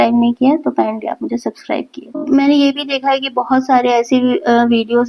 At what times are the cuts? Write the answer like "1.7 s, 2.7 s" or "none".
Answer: 2.2 s

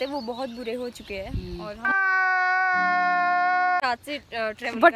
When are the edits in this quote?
none

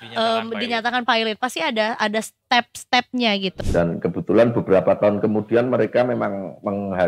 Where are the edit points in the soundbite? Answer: 3.5 s

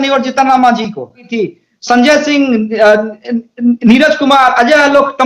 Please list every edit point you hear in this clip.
1.3 s

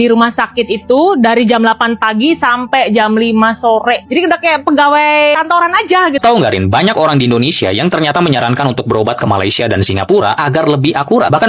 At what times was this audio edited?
6.2 s

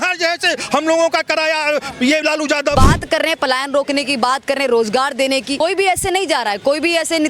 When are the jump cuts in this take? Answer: 2.7 s, 5.6 s

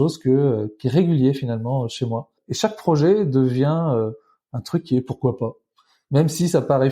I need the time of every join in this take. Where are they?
2.4 s

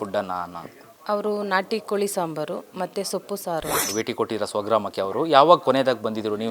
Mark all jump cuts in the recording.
3.9 s

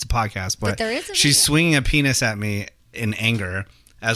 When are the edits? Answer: none

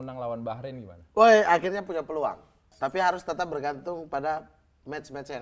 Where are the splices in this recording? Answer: 2.7 s

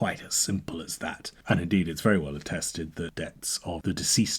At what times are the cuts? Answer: none

